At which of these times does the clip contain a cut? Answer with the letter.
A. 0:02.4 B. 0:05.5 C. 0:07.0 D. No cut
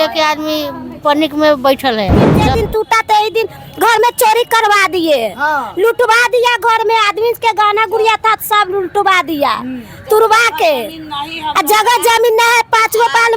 A